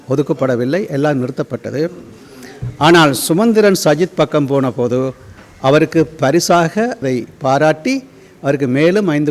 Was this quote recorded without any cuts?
no; 1 cut; at 7.0 s

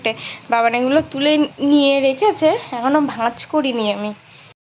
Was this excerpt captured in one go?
yes; 0 cuts

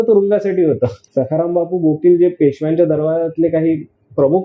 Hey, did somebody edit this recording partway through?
yes; 1 cut; at 1.0 s

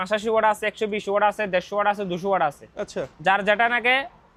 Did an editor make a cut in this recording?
no; 0 cuts

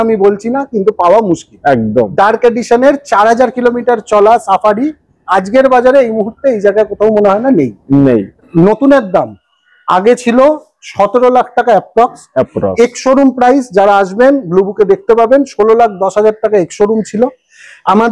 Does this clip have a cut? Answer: yes; 1 cut; at 8.5 s

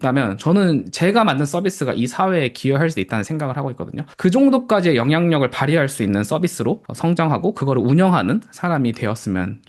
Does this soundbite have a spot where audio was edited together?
yes; 2 cuts; at 4.1 s, 6.9 s

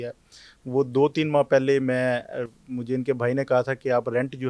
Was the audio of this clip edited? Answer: no; 0 cuts

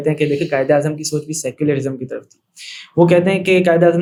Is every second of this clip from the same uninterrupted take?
yes; 0 cuts

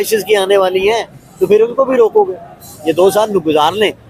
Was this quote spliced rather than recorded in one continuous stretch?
no; 0 cuts

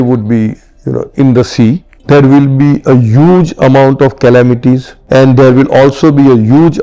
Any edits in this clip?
yes; 2 cuts; at 1.9 s, 4.9 s

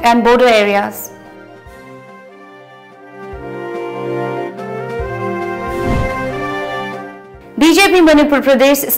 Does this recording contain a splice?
yes; 1 cut; at 1.0 s

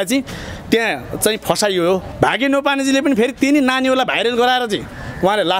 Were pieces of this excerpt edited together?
yes; 1 cut; at 2.1 s

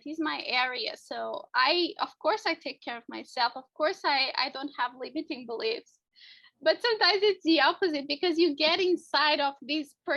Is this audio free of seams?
yes; 0 cuts

